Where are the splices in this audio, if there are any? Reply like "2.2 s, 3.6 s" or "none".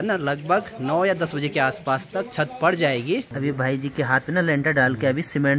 3.3 s